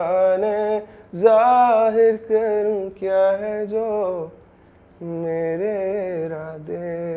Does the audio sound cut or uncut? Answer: uncut